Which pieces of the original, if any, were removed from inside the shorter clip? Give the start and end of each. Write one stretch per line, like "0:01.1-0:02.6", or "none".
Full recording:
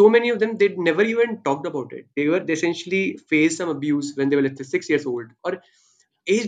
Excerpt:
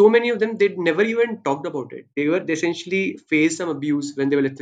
none